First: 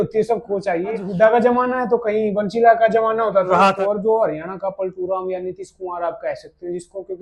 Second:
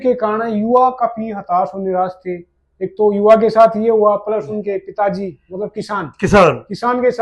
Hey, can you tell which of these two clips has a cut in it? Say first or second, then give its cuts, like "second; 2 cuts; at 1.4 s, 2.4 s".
first; 2 cuts; at 1.1 s, 3.7 s